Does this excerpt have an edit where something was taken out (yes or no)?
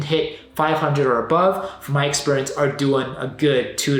no